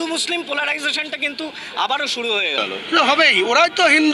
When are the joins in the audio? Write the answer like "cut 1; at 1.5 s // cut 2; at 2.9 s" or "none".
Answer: none